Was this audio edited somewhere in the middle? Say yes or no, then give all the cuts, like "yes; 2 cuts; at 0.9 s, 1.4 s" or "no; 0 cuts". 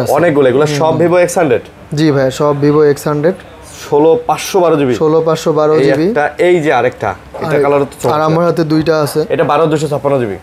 no; 0 cuts